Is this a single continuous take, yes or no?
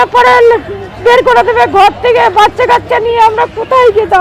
yes